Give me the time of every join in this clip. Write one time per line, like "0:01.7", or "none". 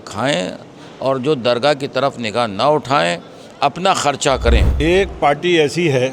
0:04.7